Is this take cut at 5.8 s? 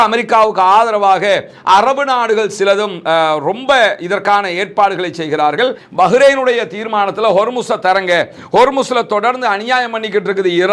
yes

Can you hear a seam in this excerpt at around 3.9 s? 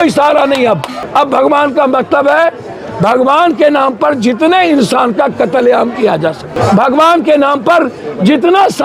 no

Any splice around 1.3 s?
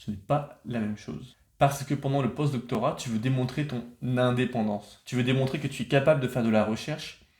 yes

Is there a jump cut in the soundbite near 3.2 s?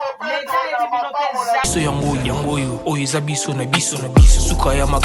no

